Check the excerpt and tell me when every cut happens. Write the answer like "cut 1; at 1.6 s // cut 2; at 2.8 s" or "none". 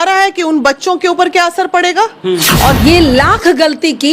cut 1; at 2.8 s